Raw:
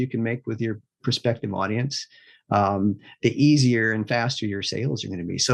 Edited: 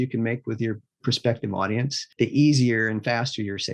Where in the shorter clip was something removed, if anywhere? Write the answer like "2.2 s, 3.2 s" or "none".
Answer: 2.0 s